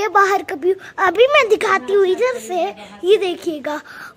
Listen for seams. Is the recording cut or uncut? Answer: uncut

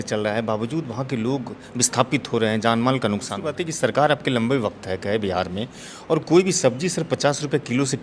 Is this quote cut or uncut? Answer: cut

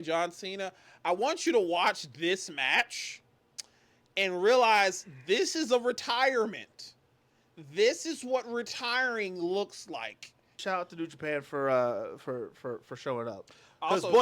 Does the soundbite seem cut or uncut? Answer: cut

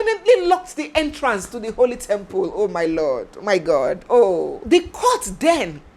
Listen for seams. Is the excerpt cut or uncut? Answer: cut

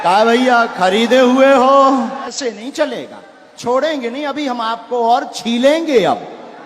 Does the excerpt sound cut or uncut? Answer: cut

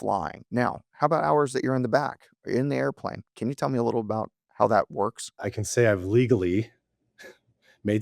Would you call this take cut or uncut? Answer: cut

